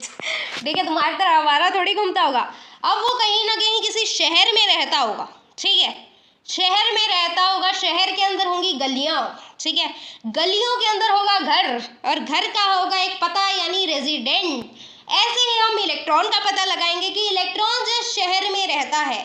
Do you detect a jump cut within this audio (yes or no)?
no